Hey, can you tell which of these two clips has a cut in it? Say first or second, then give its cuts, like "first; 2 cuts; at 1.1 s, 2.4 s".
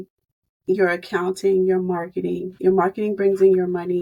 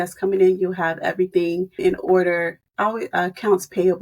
second; 2 cuts; at 1.8 s, 2.6 s